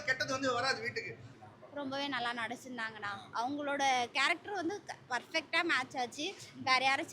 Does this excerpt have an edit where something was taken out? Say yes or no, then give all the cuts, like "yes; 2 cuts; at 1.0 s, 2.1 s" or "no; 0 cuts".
yes; 1 cut; at 1.2 s